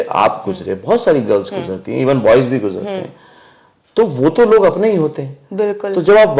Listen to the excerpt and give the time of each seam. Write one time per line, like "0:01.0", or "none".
none